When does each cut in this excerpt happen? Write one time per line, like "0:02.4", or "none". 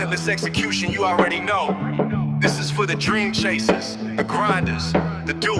none

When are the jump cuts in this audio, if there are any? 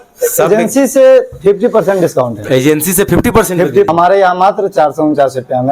0:03.9

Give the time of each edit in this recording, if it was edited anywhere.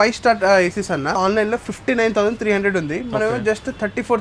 0:01.2

